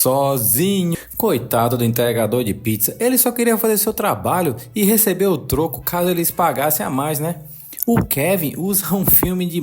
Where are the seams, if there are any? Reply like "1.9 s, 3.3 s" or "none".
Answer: 0.9 s